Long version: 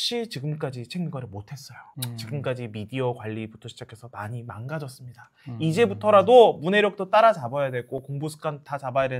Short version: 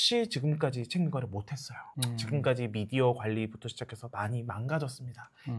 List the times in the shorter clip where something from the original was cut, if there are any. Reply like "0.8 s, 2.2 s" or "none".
none